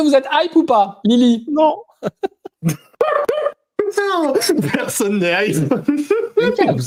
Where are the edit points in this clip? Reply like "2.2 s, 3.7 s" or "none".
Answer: none